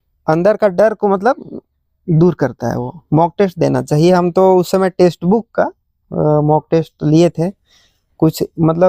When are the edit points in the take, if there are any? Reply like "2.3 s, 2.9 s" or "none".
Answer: none